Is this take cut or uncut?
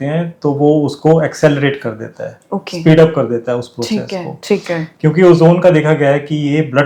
uncut